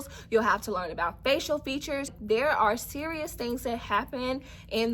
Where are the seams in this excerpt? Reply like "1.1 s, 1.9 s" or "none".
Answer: 2.2 s

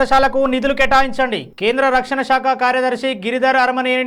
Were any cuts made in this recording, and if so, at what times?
none

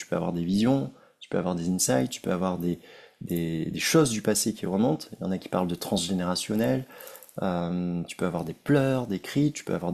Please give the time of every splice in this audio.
none

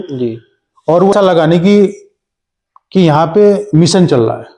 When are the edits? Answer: 1.1 s

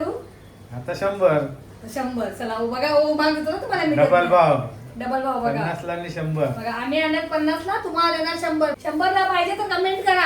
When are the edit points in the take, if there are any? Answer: 8.7 s

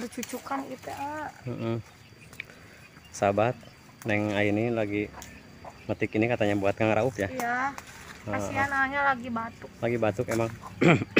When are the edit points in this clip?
none

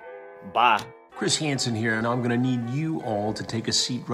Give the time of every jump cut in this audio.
1.1 s

